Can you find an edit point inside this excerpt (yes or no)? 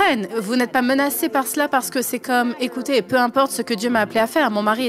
no